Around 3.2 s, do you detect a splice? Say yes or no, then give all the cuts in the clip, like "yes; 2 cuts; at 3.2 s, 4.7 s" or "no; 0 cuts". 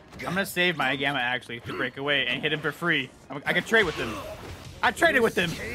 no; 0 cuts